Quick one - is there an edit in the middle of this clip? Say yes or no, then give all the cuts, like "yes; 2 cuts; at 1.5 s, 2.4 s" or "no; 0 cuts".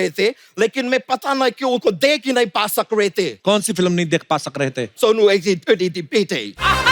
yes; 2 cuts; at 3.3 s, 4.9 s